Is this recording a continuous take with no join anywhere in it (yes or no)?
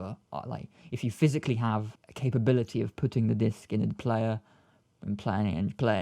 no